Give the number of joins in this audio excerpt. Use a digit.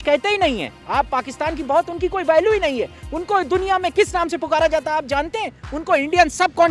0